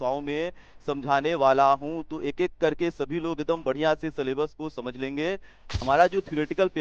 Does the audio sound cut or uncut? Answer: cut